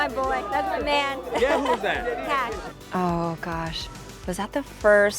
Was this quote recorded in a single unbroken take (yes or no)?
no